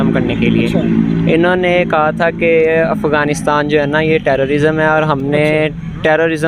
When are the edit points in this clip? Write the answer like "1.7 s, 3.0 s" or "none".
none